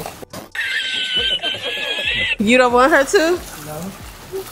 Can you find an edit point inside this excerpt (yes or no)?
no